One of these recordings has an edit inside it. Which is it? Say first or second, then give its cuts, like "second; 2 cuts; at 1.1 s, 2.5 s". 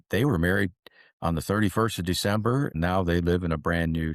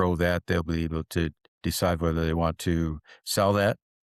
first; 1 cut; at 2.8 s